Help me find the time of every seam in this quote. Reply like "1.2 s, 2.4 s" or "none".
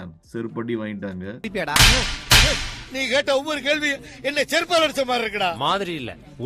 none